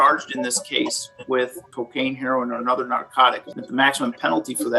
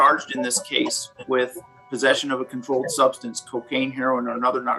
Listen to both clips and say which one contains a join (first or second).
first